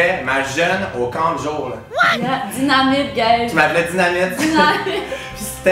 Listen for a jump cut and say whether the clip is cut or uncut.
uncut